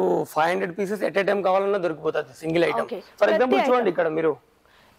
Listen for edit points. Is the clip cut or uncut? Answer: uncut